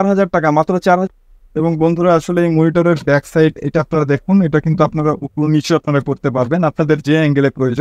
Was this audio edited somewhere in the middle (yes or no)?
yes